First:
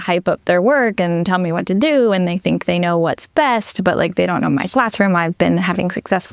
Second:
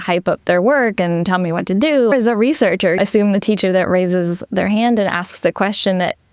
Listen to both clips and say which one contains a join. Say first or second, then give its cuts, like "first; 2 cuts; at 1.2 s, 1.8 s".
second; 1 cut; at 2.1 s